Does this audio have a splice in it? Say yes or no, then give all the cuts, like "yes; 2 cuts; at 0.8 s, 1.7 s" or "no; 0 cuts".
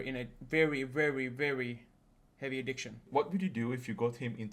yes; 1 cut; at 3.0 s